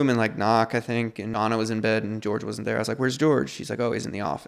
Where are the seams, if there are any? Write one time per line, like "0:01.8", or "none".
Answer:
0:01.3